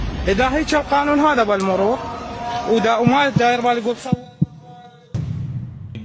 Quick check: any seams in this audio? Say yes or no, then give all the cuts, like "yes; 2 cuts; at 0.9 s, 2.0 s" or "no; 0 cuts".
yes; 1 cut; at 5.1 s